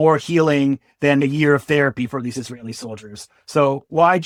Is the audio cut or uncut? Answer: uncut